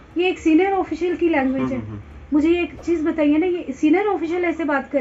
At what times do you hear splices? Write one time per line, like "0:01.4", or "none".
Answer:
none